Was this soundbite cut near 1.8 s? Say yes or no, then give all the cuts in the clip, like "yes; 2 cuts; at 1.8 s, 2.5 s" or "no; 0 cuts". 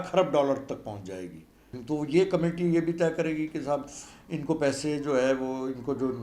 yes; 1 cut; at 1.8 s